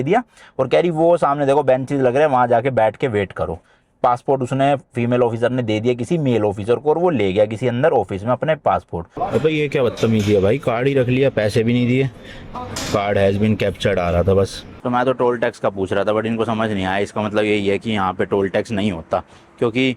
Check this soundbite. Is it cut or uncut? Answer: cut